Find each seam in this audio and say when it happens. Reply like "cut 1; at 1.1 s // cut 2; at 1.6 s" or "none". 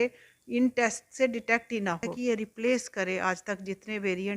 cut 1; at 2.1 s